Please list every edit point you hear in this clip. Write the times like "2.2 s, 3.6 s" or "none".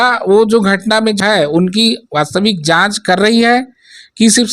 1.2 s